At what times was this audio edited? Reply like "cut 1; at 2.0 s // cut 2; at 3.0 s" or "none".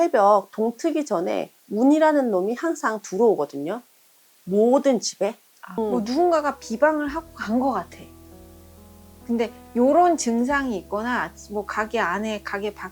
cut 1; at 5.8 s

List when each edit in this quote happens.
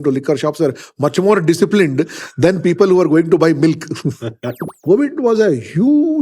cut 1; at 4.7 s

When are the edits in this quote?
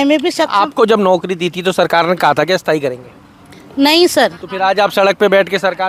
none

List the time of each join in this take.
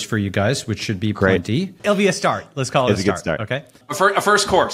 cut 1; at 1.8 s // cut 2; at 3.8 s

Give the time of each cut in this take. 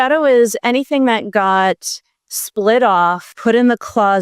cut 1; at 3.3 s

